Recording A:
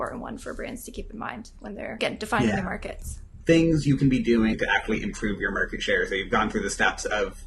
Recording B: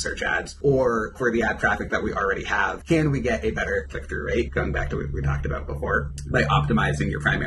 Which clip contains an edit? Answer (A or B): A